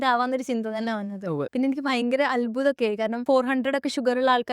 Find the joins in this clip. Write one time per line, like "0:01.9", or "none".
0:01.4
0:03.2